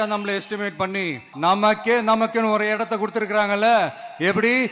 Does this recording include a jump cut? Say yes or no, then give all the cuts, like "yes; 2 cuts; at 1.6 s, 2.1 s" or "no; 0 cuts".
yes; 1 cut; at 1.2 s